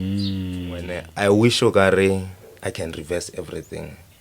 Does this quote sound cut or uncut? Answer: cut